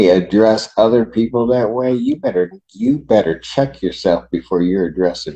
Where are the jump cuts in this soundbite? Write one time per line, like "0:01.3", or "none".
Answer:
none